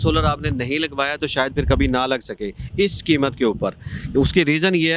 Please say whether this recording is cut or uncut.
uncut